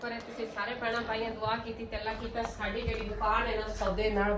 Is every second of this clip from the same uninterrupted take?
yes; 0 cuts

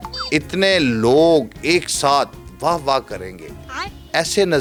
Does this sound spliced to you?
no; 0 cuts

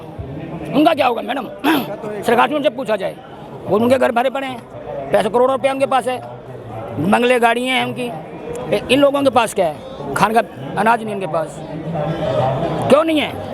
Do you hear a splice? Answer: no; 0 cuts

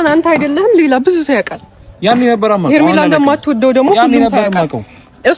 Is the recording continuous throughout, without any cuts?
yes; 0 cuts

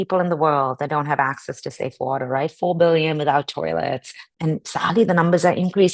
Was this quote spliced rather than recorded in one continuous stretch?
yes; 1 cut; at 4.3 s

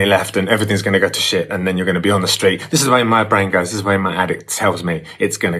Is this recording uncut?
yes; 0 cuts

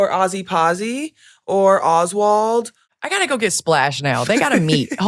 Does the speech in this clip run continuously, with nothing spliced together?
yes; 0 cuts

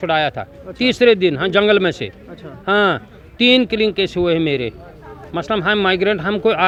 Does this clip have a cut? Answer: no; 0 cuts

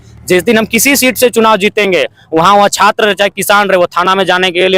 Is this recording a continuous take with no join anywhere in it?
yes; 0 cuts

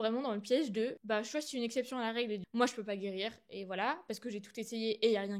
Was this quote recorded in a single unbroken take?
yes; 0 cuts

